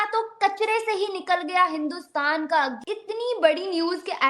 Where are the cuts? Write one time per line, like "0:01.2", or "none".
0:02.8

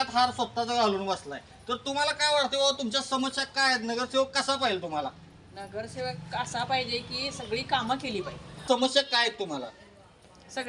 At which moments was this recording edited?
0:08.6

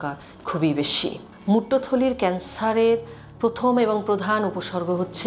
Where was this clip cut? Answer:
0:01.3

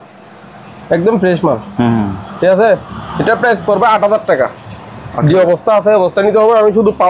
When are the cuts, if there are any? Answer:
none

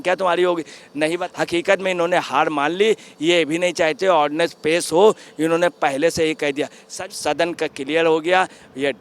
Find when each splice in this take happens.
0:01.2
0:06.9

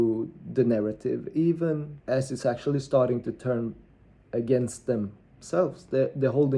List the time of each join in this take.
0:01.9

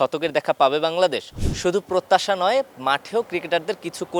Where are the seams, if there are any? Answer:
0:01.3

